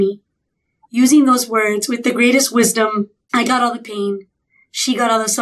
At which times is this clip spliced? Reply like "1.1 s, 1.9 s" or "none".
3.2 s